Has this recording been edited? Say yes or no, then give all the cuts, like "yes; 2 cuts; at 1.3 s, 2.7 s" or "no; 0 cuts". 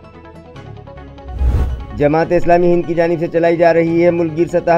yes; 1 cut; at 1.9 s